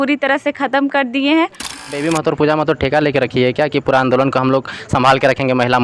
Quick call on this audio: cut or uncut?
cut